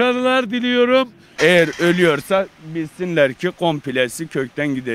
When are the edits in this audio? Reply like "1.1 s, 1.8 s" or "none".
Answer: 1.3 s